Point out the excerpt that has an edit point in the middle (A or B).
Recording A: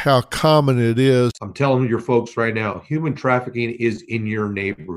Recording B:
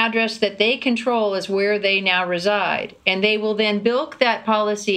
A